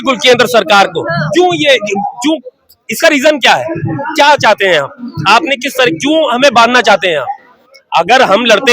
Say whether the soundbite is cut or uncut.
uncut